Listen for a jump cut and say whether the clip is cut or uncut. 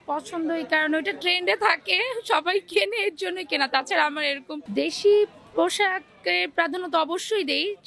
cut